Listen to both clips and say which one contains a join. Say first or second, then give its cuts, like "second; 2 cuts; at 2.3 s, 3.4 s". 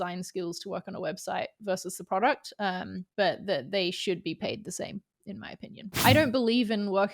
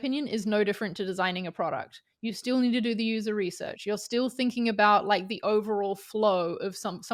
first; 2 cuts; at 3.0 s, 6.0 s